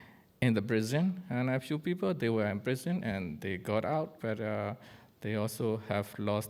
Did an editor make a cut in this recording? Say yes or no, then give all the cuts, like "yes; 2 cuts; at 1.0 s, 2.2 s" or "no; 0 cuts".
no; 0 cuts